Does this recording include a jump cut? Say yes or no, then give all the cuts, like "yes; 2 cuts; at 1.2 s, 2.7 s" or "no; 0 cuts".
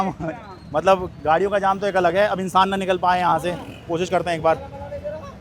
no; 0 cuts